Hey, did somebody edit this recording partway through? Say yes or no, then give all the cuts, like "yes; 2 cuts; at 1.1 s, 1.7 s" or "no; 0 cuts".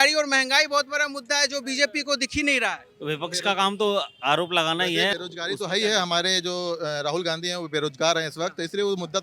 yes; 1 cut; at 5.1 s